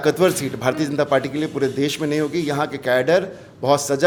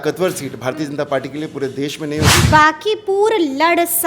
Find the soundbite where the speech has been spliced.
second; 1 cut; at 2.4 s

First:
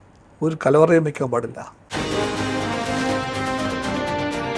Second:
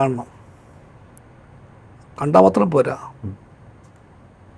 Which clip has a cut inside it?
first; 1 cut; at 1.9 s

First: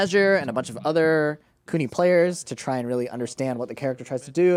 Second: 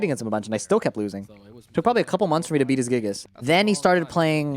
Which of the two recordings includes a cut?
second; 1 cut; at 3.2 s

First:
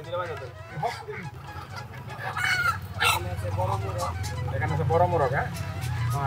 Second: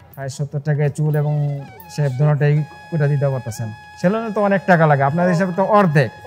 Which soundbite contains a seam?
first; 1 cut; at 1.4 s

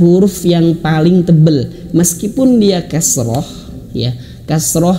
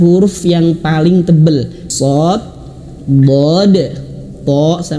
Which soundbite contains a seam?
second; 1 cut; at 1.8 s

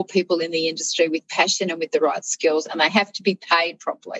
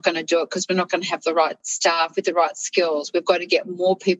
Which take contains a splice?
second; 1 cut; at 1.7 s

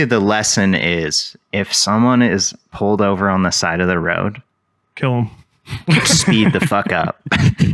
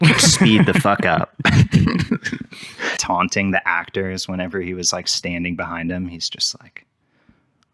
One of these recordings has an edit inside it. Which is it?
second; 1 cut; at 2.9 s

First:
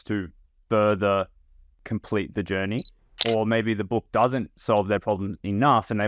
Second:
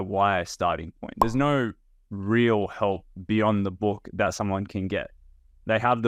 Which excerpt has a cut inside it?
first; 2 cuts; at 1.8 s, 3.2 s

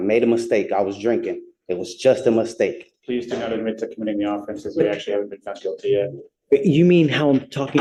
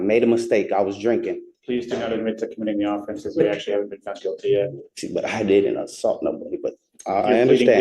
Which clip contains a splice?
second; 2 cuts; at 1.5 s, 4.9 s

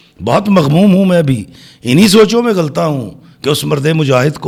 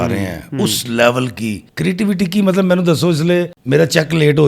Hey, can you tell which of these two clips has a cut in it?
second; 2 cuts; at 1.7 s, 3.6 s

